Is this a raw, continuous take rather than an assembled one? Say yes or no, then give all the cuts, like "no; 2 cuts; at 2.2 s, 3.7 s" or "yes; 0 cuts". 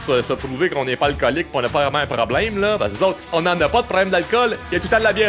no; 1 cut; at 3.2 s